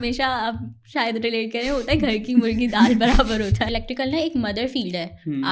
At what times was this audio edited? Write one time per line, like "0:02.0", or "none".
0:03.7